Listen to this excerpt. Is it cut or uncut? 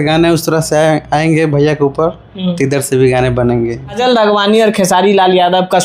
cut